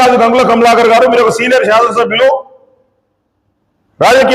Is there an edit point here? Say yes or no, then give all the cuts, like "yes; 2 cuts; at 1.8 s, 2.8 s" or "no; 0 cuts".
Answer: no; 0 cuts